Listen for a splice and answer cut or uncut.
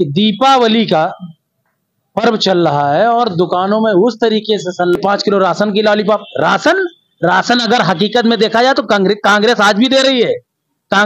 cut